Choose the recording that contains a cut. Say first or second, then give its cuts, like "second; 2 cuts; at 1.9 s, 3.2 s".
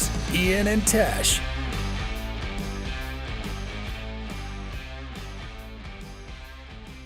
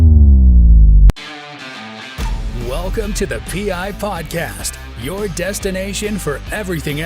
second; 1 cut; at 1.1 s